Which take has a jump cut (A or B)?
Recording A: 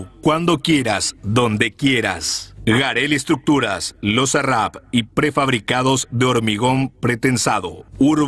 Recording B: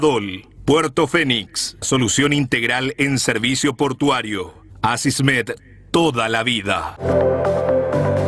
B